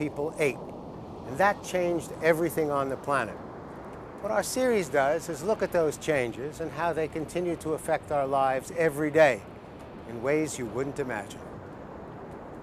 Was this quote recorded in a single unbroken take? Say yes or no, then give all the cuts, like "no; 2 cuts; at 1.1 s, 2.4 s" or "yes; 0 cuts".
yes; 0 cuts